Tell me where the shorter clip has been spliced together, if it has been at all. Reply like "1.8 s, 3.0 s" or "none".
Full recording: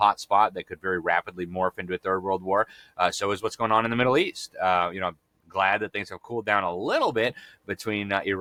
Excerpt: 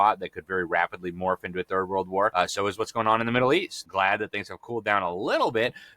2.3 s, 3.8 s